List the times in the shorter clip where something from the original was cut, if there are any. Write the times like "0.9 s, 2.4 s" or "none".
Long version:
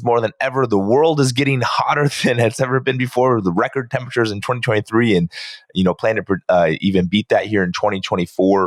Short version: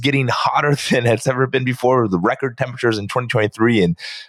none